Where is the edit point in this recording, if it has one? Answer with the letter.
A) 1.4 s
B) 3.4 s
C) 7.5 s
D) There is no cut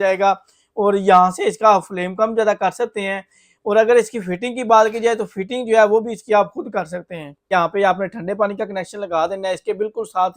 C